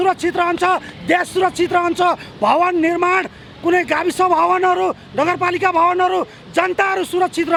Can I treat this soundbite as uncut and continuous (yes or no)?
yes